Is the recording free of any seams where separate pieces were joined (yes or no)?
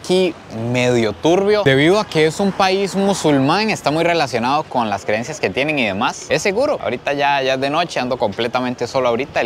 yes